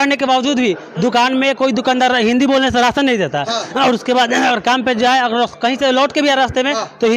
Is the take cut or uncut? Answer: uncut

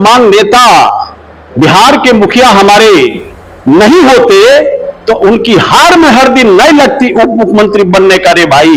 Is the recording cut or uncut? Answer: uncut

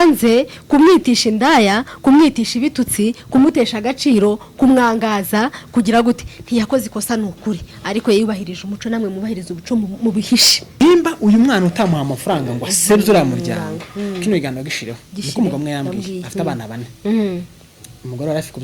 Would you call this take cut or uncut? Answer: cut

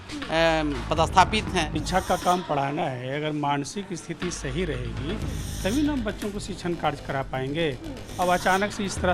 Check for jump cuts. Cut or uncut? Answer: cut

